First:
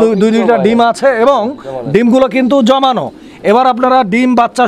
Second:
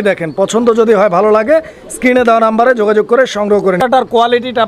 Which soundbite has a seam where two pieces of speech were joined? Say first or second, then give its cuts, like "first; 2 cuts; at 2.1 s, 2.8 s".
second; 1 cut; at 3.8 s